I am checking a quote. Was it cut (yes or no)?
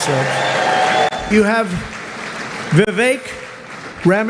yes